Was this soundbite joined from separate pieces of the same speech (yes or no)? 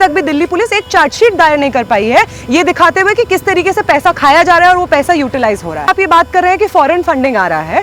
yes